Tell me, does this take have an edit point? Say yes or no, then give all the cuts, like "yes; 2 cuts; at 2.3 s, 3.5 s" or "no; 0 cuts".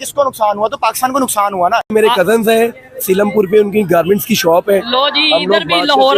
yes; 1 cut; at 1.9 s